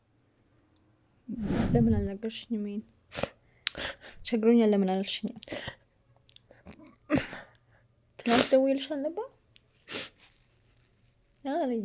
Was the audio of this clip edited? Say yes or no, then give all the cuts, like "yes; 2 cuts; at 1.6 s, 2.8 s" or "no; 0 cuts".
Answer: yes; 1 cut; at 1.5 s